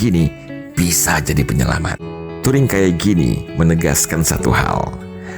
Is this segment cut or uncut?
cut